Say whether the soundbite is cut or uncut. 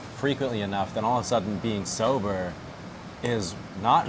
uncut